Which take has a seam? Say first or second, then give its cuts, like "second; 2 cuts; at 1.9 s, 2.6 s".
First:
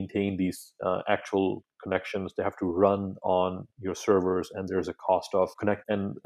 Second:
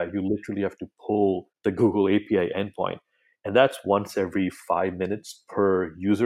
second; 1 cut; at 1.5 s